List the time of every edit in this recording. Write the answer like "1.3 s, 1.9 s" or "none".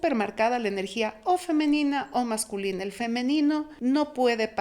3.7 s